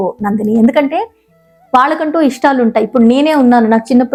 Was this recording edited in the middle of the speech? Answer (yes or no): no